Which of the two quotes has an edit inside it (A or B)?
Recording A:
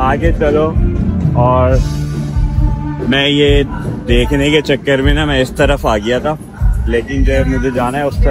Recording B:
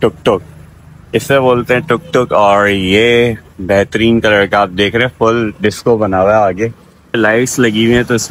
B